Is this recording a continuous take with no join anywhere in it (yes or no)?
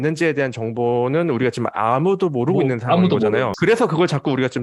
no